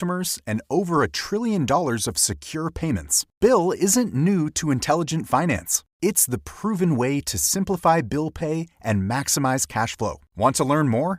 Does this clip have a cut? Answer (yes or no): no